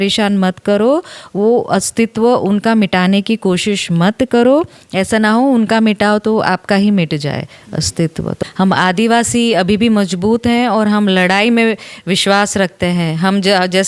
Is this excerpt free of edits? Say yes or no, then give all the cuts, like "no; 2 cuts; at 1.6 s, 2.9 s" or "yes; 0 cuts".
no; 1 cut; at 8.4 s